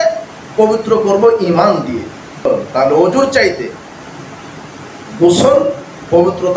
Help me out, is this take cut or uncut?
cut